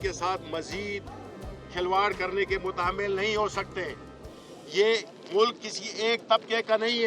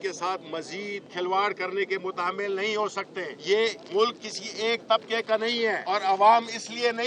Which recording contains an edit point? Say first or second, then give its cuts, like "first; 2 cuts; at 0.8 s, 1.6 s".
second; 3 cuts; at 1.0 s, 3.8 s, 5.8 s